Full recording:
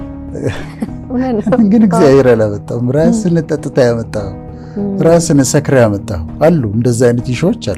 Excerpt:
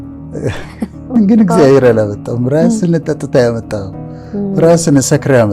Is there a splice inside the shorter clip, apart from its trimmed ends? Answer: yes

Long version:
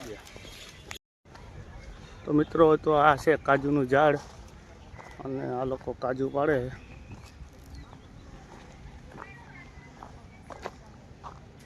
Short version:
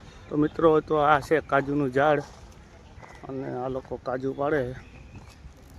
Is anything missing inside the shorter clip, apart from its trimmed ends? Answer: no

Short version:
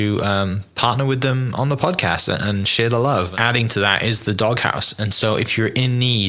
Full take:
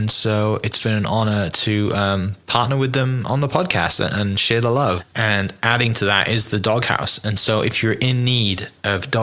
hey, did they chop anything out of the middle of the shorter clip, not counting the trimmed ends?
yes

